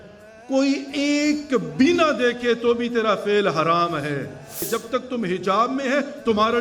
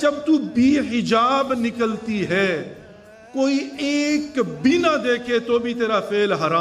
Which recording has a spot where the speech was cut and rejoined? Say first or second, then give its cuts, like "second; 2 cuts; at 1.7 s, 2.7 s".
first; 1 cut; at 4.7 s